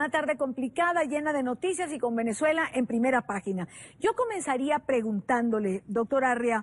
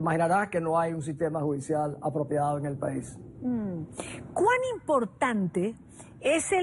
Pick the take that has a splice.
second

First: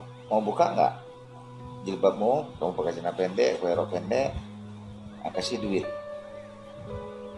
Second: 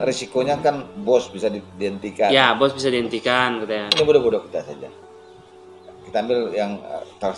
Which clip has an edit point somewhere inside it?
first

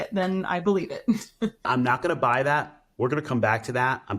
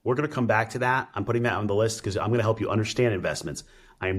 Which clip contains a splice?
first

